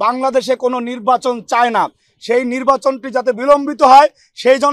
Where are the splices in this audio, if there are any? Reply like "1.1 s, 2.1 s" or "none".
none

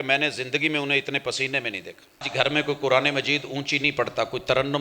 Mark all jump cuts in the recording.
2.3 s

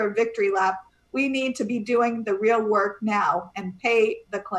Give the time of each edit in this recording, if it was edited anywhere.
none

